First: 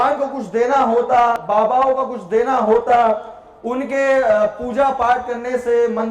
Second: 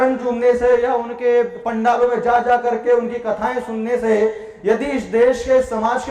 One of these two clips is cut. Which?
first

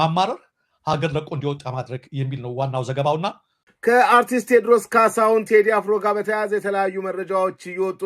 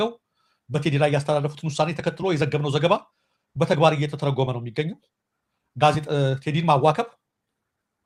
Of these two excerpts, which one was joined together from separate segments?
first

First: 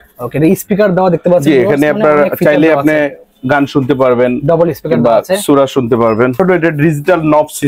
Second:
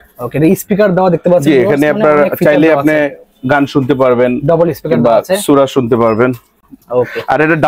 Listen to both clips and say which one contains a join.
first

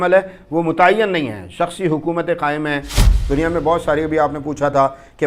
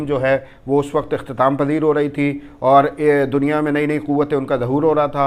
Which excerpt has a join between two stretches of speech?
first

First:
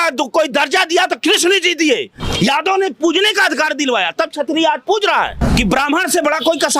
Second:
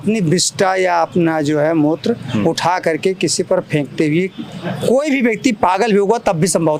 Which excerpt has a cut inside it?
first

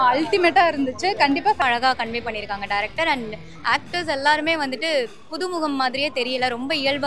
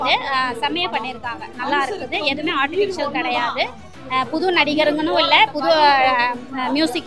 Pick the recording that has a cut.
first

